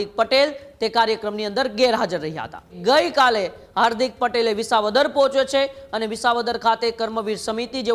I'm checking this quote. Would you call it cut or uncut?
cut